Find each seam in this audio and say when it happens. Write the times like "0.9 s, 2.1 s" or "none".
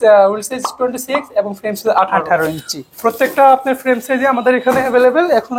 none